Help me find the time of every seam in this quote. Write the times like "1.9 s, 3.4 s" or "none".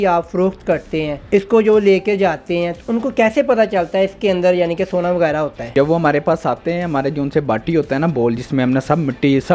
1.2 s, 5.6 s